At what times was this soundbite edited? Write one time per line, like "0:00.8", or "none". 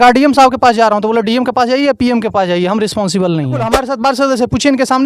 0:03.8